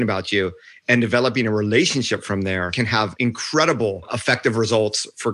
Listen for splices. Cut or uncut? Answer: cut